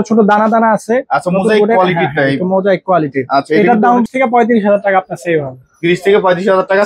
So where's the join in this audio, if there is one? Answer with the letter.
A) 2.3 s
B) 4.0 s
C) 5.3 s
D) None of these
B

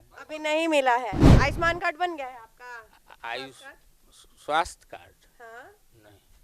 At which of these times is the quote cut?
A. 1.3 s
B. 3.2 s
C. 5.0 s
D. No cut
A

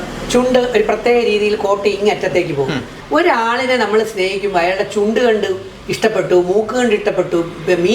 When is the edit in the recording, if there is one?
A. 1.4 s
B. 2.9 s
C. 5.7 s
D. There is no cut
B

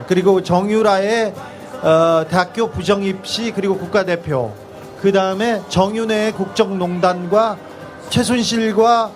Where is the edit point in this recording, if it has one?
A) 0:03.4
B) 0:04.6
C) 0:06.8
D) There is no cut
A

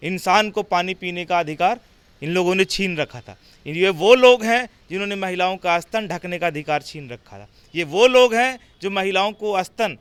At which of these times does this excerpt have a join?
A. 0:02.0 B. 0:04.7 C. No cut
C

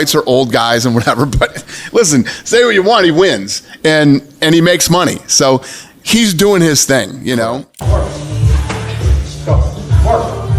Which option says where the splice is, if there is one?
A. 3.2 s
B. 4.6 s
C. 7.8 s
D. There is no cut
C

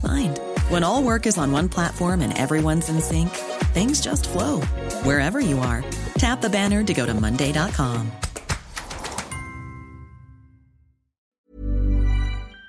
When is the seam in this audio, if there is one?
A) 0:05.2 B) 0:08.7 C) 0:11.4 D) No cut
C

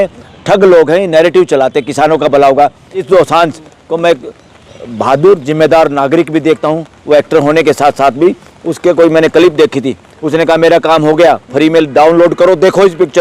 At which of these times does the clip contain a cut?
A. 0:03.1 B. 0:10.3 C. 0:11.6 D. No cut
A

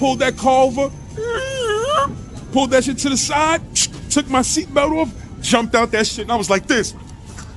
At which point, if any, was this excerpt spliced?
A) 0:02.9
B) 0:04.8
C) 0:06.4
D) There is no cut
D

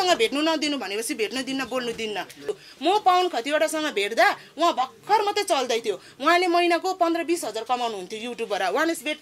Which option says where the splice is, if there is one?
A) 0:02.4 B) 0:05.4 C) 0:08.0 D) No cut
A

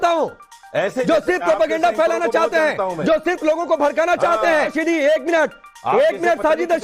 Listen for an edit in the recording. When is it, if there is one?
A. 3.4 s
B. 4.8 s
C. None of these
B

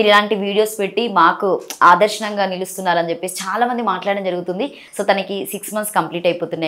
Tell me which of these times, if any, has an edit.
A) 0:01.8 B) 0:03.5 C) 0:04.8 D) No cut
C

